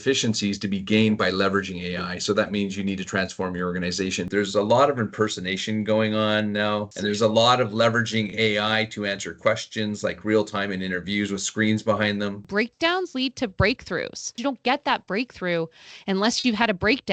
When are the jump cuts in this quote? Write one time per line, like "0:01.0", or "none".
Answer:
0:04.3
0:06.9
0:12.4
0:14.4